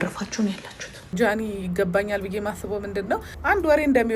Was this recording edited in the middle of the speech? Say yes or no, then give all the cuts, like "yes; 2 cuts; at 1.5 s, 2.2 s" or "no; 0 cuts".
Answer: yes; 2 cuts; at 1.1 s, 3.3 s